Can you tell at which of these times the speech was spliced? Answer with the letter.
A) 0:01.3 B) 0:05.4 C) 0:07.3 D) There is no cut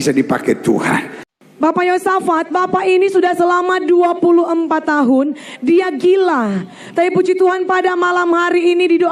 A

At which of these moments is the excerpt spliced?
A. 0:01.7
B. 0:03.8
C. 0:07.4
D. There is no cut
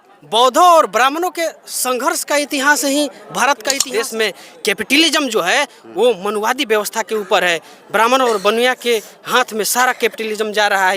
B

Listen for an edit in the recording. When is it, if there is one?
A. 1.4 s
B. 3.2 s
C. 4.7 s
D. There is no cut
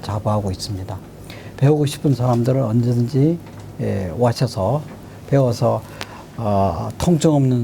D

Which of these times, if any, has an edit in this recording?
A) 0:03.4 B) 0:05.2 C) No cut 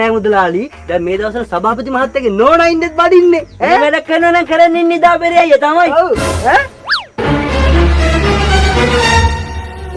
C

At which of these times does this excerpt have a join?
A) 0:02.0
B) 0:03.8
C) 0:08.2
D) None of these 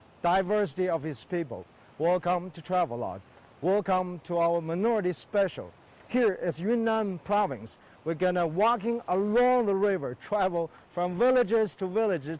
C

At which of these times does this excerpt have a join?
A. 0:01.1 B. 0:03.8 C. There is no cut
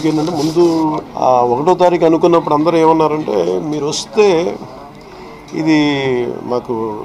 A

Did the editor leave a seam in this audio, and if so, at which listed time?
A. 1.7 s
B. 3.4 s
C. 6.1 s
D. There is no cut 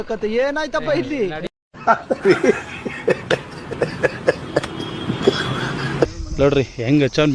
C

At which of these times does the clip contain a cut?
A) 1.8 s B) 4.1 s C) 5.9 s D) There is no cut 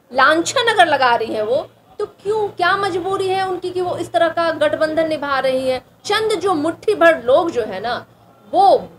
C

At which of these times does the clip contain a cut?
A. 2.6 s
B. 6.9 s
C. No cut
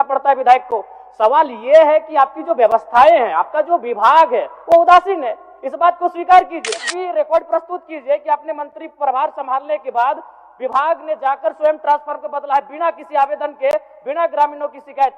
B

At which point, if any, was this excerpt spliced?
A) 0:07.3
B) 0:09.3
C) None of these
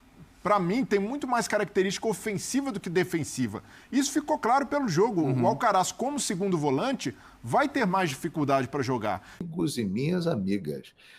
B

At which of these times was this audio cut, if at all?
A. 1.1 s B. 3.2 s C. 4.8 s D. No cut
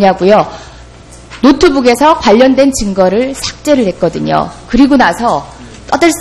D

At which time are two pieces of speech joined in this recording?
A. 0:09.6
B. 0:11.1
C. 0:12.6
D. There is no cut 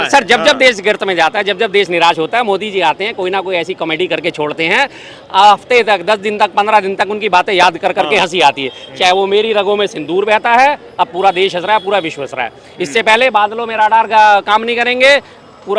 D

